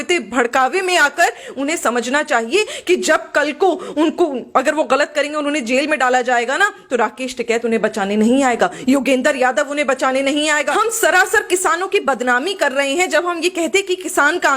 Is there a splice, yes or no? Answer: yes